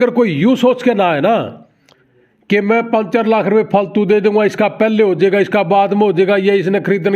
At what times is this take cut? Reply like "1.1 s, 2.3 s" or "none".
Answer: none